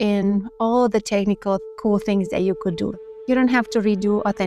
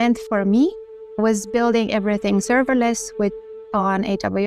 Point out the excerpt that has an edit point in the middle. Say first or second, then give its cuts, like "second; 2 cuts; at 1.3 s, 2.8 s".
first; 2 cuts; at 1.7 s, 2.9 s